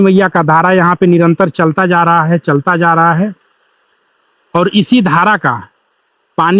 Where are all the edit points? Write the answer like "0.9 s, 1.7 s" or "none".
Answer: none